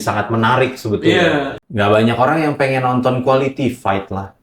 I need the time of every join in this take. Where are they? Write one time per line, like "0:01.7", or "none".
0:01.6